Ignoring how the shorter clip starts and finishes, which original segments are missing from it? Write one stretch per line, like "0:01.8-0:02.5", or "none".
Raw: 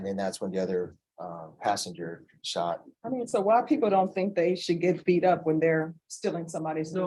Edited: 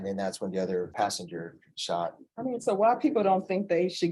0:00.9-0:01.6